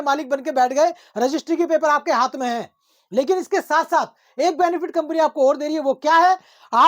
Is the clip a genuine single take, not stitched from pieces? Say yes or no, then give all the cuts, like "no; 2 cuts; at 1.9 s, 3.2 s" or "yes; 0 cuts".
yes; 0 cuts